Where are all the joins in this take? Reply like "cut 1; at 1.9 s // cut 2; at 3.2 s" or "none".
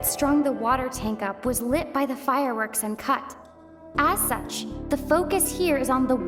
none